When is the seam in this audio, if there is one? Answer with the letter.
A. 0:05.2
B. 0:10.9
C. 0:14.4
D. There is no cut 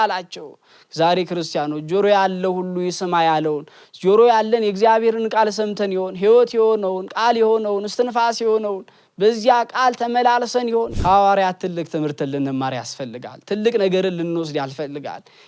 B